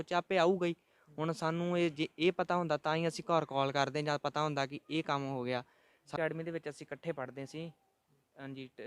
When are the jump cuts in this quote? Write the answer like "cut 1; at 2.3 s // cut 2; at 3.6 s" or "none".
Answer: cut 1; at 6.0 s